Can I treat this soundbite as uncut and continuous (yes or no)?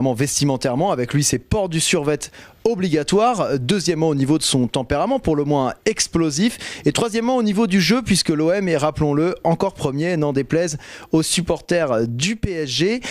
no